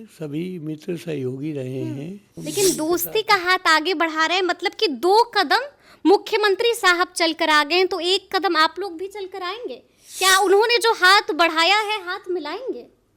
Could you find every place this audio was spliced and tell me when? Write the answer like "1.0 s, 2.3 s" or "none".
2.4 s

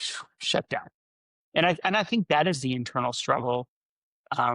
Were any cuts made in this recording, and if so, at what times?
1.0 s

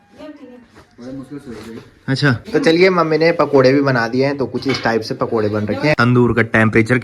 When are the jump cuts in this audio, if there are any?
2.4 s, 6.0 s

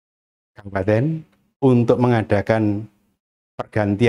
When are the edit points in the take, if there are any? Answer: none

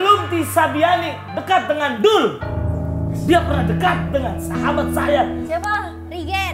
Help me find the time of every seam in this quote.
5.4 s

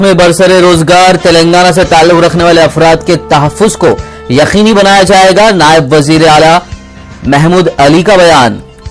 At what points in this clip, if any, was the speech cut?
none

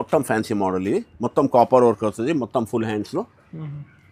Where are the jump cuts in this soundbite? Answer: none

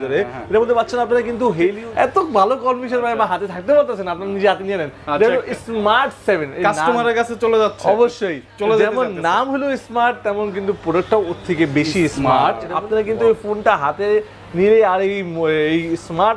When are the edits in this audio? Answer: 1.8 s, 12.7 s

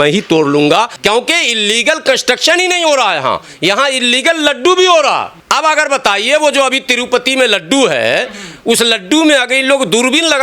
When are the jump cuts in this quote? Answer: 0.9 s, 5.3 s

